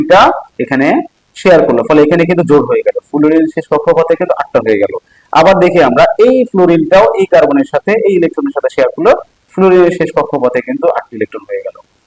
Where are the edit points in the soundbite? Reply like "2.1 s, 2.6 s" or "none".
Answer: none